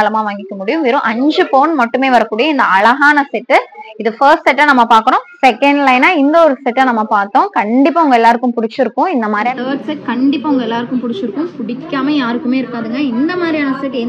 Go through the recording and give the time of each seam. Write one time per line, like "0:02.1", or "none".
0:05.4
0:09.5